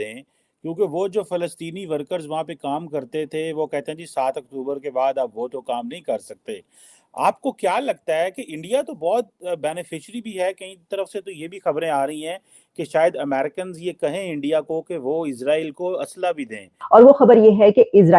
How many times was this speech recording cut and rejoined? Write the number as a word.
one